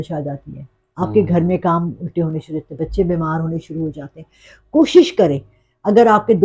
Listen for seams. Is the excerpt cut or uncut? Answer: uncut